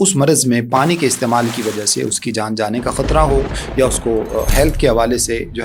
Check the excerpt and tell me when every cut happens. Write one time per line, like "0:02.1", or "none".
none